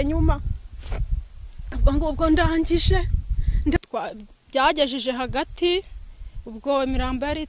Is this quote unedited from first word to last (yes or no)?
no